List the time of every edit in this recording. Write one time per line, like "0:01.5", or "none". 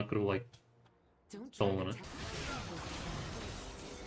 0:02.0